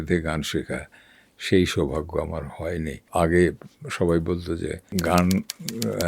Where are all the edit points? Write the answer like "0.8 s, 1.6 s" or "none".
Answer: 3.0 s, 4.8 s